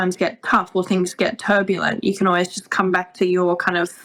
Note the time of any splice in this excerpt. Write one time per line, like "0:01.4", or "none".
none

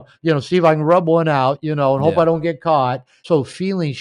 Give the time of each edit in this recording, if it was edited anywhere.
0:03.1

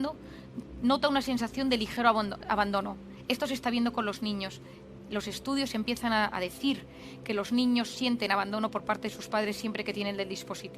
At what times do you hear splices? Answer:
0:08.7

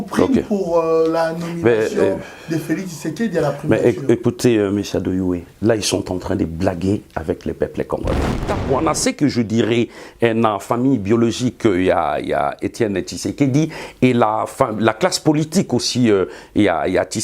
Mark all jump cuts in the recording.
0:08.5

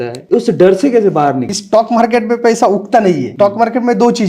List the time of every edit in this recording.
0:01.5
0:03.3

